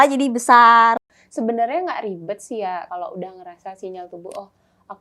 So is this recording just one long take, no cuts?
no; 2 cuts; at 1.0 s, 2.9 s

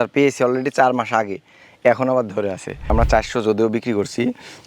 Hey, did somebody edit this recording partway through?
yes; 1 cut; at 2.9 s

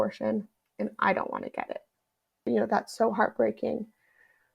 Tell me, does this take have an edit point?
yes; 1 cut; at 2.5 s

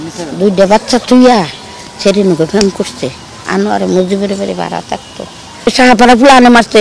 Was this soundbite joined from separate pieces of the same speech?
yes; 1 cut; at 5.7 s

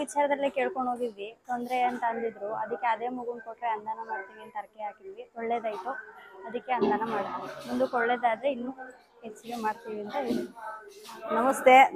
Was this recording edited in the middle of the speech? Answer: no; 0 cuts

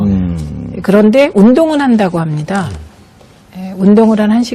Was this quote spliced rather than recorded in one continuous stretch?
no; 0 cuts

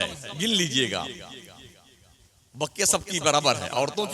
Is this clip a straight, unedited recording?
yes; 0 cuts

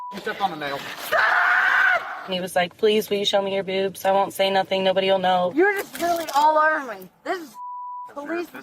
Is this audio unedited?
no; 2 cuts; at 2.2 s, 5.5 s

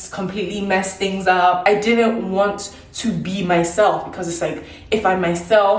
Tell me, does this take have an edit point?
yes; 1 cut; at 1.6 s

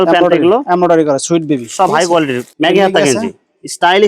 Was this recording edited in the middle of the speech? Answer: yes; 1 cut; at 2.5 s

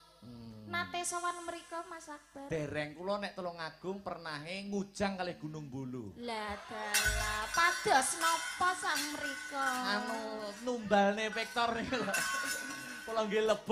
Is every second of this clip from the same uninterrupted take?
yes; 0 cuts

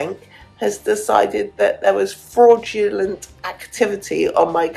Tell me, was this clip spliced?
no; 0 cuts

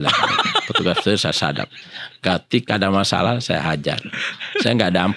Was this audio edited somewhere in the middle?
no; 0 cuts

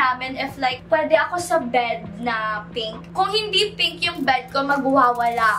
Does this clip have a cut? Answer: yes; 2 cuts; at 0.9 s, 3.2 s

